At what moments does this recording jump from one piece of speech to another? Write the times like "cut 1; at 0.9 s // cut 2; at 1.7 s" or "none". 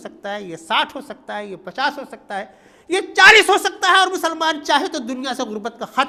none